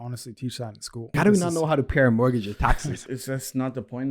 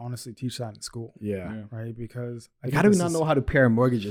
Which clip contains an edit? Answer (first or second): first